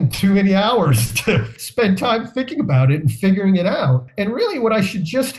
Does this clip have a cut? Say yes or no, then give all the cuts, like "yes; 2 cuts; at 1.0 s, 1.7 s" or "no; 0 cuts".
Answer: yes; 2 cuts; at 1.5 s, 4.1 s